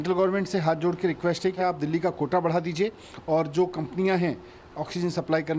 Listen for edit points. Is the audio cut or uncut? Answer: cut